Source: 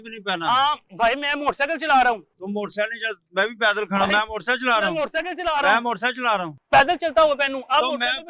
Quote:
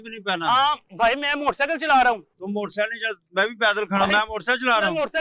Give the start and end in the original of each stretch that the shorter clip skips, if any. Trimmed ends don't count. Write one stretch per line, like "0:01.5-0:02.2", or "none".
none